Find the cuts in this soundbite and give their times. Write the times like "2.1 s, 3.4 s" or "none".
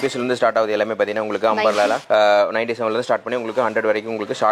2.0 s